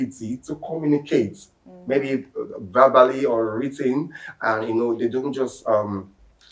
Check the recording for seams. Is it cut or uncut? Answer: uncut